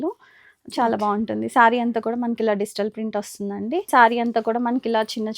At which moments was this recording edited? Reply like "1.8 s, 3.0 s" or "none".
3.9 s